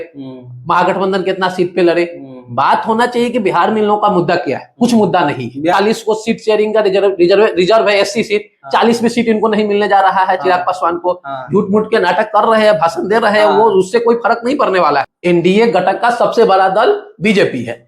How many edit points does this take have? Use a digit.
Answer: 2